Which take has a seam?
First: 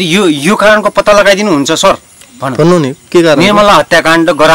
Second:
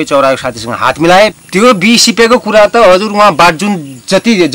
second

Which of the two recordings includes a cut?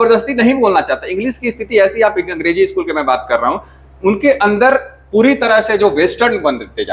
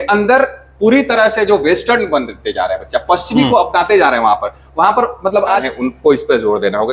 second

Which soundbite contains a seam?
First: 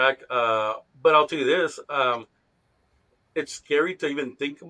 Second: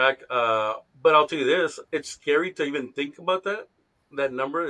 second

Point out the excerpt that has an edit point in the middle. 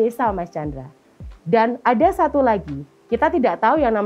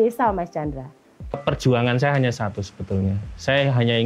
second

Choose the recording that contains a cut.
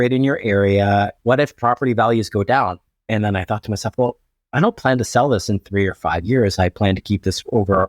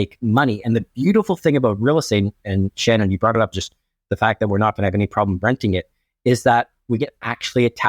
first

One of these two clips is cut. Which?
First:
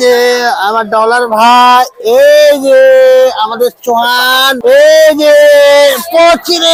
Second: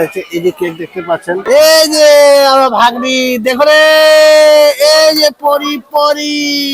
second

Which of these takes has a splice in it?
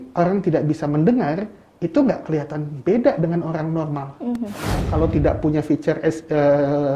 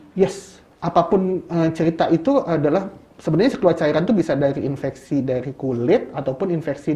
first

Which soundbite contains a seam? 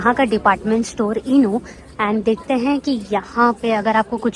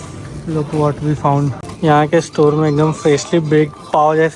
second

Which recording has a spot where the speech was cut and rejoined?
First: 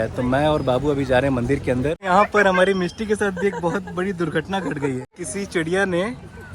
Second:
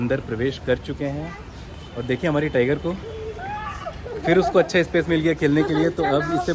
first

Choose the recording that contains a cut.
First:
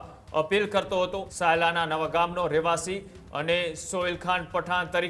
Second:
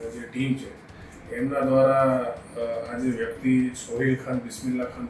first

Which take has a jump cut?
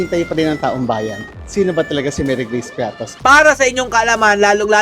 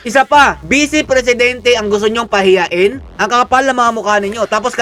first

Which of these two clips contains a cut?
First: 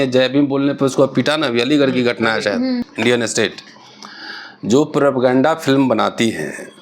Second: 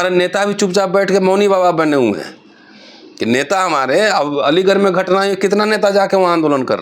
first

